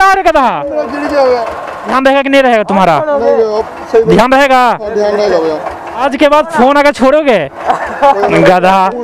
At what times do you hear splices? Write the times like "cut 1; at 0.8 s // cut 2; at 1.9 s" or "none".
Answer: cut 1; at 1.9 s // cut 2; at 6.1 s